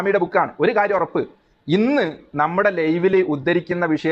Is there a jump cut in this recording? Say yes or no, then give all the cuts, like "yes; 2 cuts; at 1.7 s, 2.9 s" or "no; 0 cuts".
no; 0 cuts